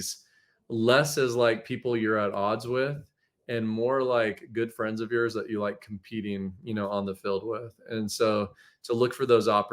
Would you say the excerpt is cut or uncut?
uncut